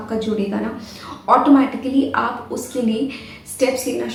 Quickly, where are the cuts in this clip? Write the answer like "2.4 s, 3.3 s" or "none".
none